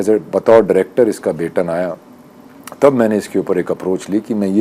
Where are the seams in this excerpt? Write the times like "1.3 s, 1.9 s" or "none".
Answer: none